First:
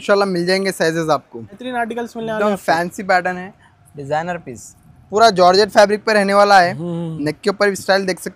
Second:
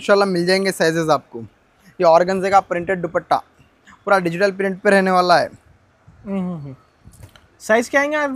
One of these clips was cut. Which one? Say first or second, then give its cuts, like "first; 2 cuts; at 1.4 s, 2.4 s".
first; 1 cut; at 1.6 s